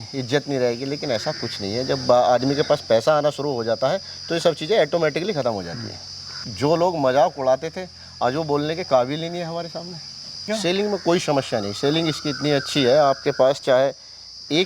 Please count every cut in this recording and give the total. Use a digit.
2